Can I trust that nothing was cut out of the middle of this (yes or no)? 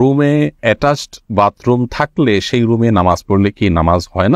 yes